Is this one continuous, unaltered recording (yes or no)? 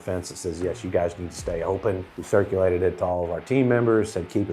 no